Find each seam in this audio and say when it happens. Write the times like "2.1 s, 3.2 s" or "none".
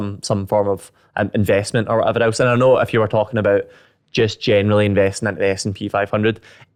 none